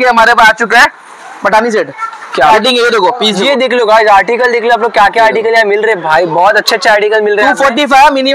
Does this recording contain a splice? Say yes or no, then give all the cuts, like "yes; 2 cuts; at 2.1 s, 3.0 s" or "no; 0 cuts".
yes; 1 cut; at 2.5 s